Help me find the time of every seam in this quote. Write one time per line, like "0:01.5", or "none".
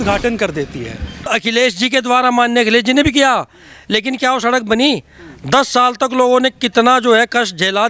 0:01.3